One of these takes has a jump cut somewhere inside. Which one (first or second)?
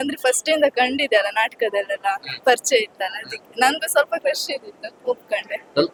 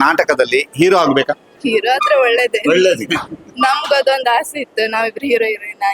second